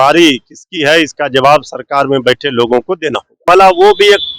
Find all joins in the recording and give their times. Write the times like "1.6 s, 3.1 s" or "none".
3.4 s